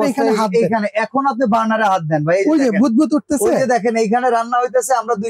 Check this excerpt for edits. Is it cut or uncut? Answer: uncut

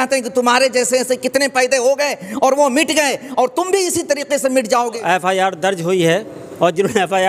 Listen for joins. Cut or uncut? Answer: cut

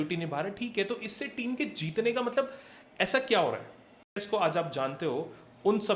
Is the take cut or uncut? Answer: cut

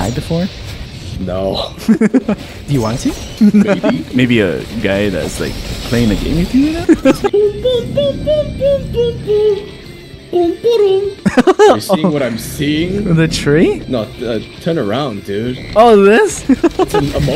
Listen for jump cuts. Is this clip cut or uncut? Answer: cut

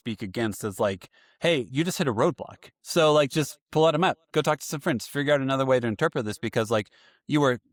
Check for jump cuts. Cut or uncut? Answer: uncut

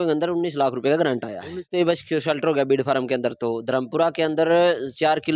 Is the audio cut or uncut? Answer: cut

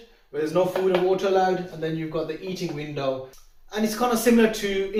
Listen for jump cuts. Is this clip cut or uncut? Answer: uncut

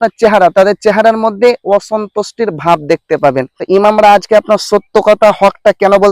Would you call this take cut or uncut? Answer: cut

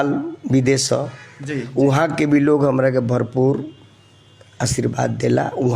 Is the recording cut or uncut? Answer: uncut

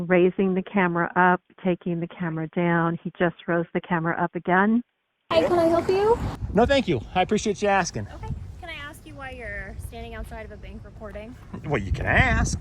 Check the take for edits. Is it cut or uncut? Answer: cut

